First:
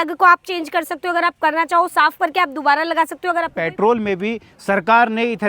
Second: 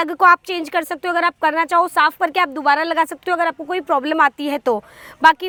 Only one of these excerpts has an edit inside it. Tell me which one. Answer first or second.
first